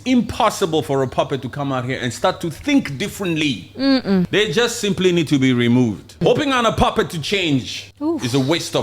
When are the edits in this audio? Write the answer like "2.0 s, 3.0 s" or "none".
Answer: 4.3 s, 6.2 s, 7.8 s